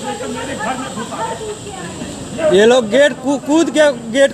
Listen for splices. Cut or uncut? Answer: uncut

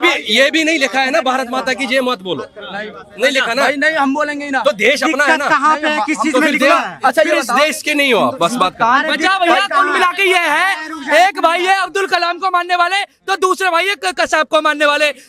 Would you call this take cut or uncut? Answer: uncut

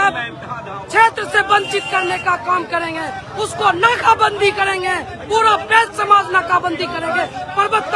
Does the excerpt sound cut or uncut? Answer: uncut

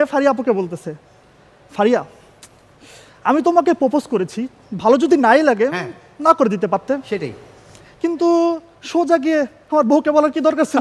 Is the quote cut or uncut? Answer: uncut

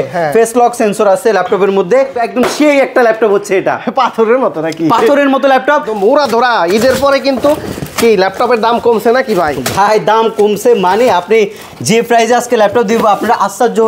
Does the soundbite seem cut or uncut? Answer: cut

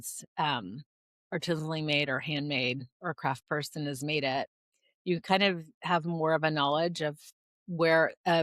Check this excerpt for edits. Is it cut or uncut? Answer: uncut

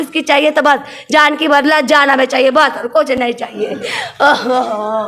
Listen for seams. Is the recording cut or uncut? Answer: uncut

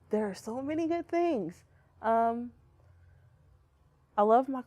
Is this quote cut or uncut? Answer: cut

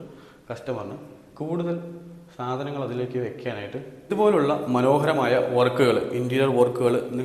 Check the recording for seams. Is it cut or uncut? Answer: cut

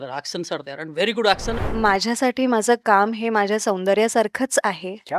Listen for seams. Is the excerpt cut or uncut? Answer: cut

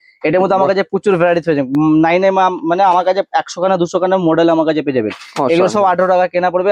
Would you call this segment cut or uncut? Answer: uncut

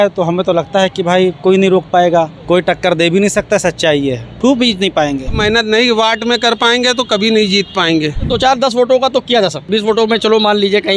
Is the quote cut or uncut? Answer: cut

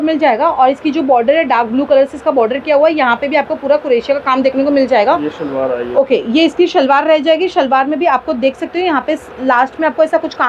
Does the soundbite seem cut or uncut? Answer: uncut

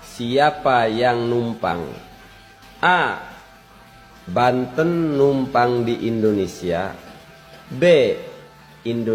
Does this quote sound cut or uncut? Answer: uncut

